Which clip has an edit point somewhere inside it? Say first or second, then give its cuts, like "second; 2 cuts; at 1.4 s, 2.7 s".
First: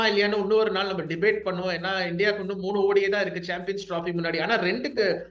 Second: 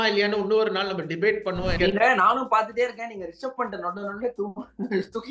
second; 1 cut; at 1.7 s